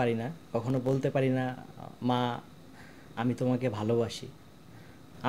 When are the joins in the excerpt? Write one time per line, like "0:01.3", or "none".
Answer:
none